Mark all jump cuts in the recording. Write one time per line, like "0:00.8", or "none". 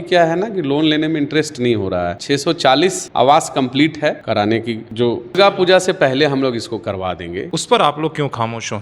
0:02.2
0:04.2
0:05.4
0:07.5